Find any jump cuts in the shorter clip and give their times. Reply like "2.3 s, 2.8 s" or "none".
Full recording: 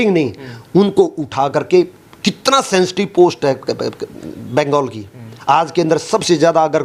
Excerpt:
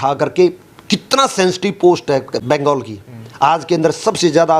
2.4 s